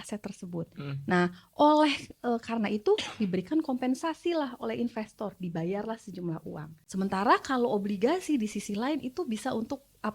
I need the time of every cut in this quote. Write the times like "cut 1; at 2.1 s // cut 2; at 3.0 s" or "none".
cut 1; at 6.7 s